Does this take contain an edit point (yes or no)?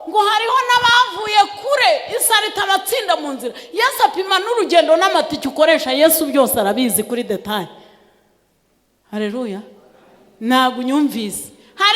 no